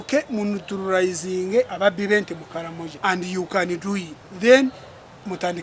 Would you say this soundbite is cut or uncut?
cut